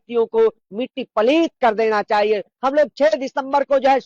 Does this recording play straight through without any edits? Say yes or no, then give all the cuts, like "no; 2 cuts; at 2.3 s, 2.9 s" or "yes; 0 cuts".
no; 1 cut; at 2.5 s